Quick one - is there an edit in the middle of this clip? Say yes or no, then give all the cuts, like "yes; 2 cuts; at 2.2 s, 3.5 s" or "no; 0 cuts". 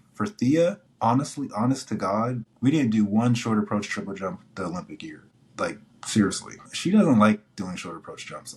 yes; 3 cuts; at 0.9 s, 2.5 s, 6.7 s